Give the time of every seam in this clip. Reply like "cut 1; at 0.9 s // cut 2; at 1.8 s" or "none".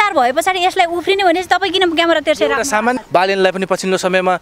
cut 1; at 3.0 s